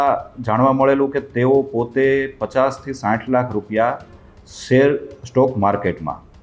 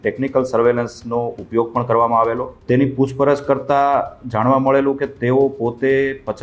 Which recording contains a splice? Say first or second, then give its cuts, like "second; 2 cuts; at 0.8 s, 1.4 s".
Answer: second; 1 cut; at 2.5 s